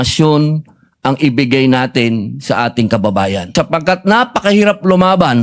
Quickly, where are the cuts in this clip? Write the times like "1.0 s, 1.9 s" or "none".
3.5 s